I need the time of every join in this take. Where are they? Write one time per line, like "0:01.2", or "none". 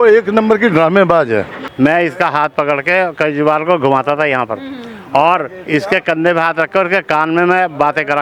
0:01.6